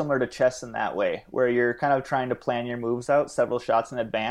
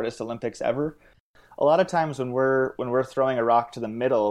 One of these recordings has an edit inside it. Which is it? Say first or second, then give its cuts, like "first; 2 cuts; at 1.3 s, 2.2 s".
second; 1 cut; at 1.3 s